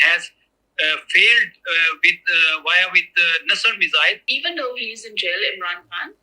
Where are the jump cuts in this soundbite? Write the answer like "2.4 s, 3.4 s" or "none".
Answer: 4.3 s